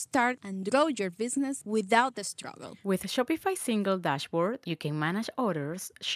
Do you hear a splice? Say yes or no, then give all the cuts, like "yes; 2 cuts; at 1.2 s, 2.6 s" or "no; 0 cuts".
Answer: no; 0 cuts